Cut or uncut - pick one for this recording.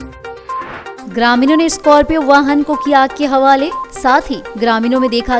uncut